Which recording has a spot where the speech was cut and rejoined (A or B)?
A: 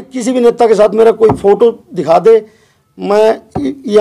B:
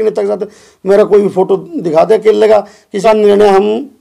B